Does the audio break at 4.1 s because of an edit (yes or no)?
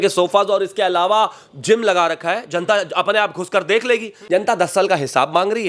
yes